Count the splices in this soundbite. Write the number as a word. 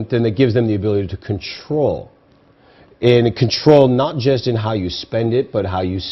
zero